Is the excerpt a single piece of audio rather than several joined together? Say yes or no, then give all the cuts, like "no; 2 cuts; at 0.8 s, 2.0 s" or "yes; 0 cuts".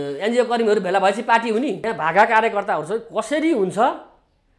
no; 1 cut; at 1.8 s